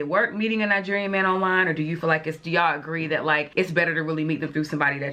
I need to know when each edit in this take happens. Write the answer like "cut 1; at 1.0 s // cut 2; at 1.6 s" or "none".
none